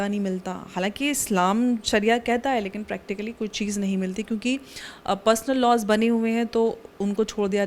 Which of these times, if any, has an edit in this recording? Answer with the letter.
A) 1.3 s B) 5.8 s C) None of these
C